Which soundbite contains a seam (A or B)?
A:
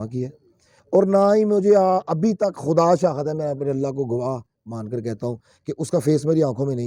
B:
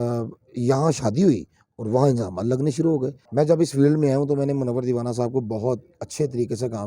B